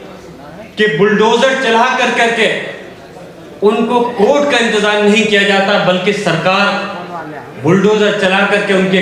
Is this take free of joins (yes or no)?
yes